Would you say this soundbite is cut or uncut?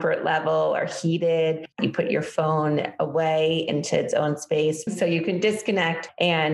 cut